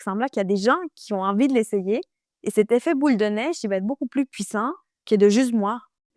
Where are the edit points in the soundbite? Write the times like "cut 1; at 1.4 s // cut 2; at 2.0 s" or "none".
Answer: cut 1; at 4.9 s